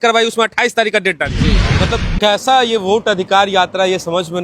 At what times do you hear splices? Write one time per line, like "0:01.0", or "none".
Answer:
0:01.6